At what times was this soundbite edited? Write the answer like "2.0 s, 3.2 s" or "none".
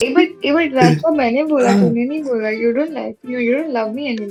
none